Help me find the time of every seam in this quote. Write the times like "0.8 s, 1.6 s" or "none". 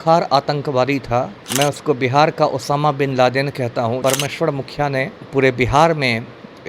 1.4 s, 4.0 s